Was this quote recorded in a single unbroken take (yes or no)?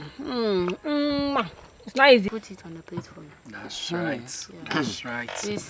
no